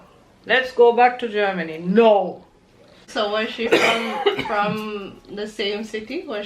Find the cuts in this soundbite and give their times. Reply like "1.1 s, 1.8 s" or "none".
3.1 s